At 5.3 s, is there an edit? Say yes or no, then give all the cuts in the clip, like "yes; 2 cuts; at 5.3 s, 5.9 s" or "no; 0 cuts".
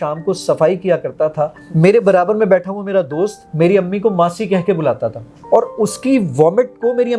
yes; 3 cuts; at 1.6 s, 3.4 s, 5.3 s